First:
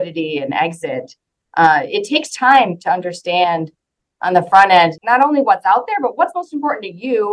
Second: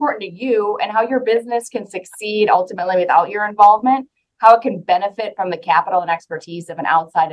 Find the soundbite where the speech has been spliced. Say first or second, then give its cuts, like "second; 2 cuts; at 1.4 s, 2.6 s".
first; 1 cut; at 4.9 s